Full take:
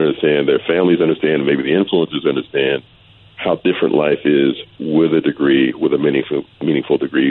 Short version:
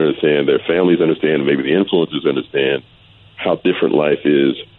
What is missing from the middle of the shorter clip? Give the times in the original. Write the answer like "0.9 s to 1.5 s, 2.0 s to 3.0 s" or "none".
none